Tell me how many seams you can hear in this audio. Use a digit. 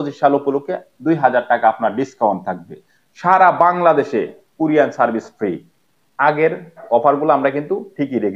1